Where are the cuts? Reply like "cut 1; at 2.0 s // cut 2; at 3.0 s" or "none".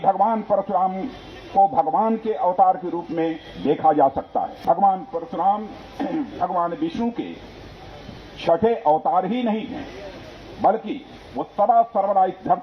cut 1; at 4.5 s